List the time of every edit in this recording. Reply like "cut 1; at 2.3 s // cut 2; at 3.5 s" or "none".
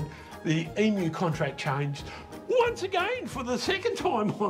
none